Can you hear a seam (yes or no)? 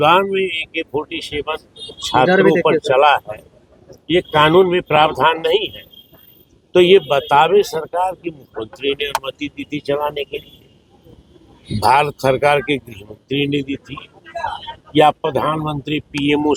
no